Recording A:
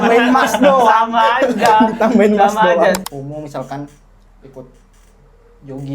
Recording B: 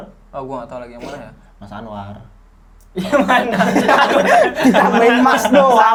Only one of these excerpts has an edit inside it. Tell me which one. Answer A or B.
A